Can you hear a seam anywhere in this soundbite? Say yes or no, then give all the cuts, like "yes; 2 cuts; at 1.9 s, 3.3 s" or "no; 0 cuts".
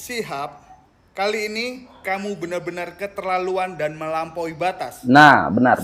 yes; 1 cut; at 4.9 s